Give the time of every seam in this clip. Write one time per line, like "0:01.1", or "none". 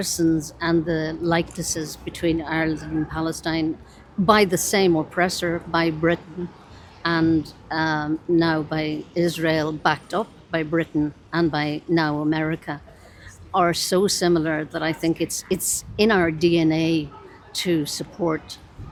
none